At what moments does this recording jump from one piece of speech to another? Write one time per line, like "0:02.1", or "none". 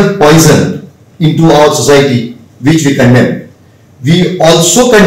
none